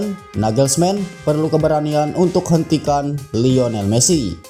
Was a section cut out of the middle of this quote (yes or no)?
no